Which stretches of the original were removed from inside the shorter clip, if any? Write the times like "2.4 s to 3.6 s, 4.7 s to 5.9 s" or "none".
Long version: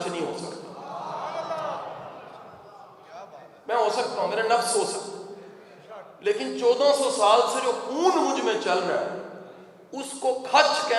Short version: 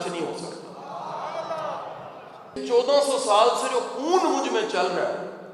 2.6 s to 6.5 s